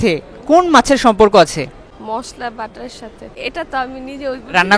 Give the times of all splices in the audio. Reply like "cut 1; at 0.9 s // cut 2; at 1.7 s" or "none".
cut 1; at 1.9 s // cut 2; at 3.3 s

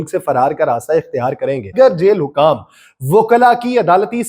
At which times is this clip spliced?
cut 1; at 1.7 s

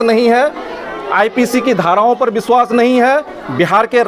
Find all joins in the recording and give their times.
none

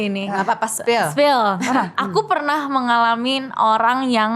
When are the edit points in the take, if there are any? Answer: cut 1; at 1.6 s

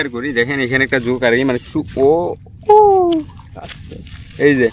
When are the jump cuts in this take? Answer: none

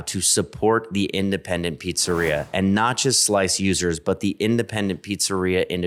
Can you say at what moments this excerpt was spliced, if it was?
none

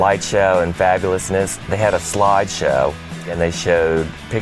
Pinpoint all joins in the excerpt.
cut 1; at 1.6 s // cut 2; at 3.3 s

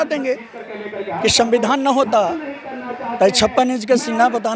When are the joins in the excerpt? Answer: cut 1; at 1.1 s

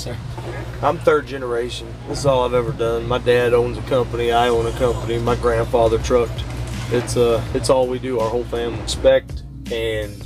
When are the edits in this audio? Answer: cut 1; at 8.9 s

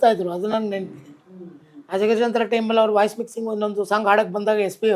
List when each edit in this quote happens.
none

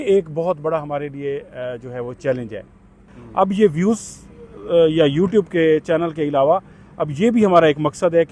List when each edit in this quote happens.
cut 1; at 3.1 s

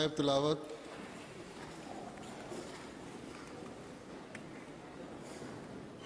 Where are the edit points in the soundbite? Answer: none

